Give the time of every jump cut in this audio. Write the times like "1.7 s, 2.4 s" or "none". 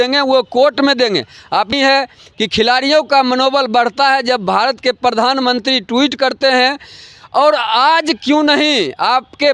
1.7 s